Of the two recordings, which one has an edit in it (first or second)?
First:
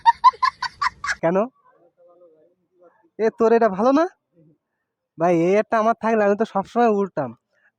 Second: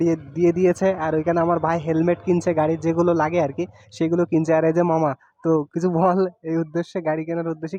first